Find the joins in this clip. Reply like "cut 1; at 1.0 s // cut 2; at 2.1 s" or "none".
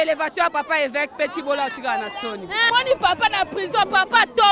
cut 1; at 2.7 s